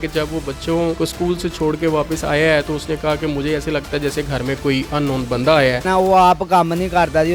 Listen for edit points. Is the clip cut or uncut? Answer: cut